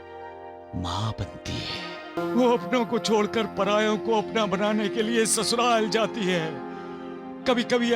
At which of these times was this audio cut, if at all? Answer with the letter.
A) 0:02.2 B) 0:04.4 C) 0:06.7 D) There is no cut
A